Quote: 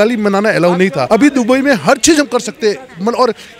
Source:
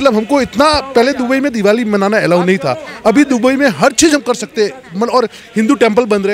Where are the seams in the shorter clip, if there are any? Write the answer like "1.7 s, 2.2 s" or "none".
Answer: 1.0 s